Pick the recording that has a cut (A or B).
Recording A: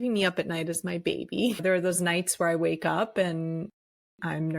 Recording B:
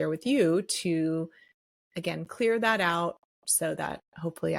A